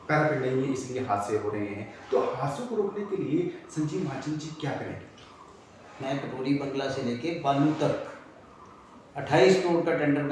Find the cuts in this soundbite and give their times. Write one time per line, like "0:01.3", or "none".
none